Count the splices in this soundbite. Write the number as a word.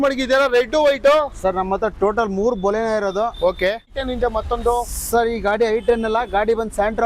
one